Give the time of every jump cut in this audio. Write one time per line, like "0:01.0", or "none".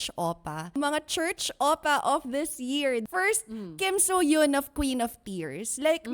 0:00.7
0:03.0
0:04.7